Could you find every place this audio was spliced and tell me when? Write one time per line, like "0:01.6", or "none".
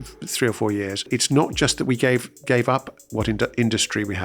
0:01.1